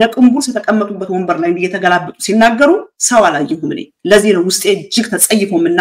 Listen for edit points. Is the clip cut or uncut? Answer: uncut